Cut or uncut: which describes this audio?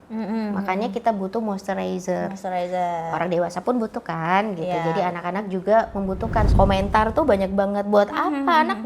cut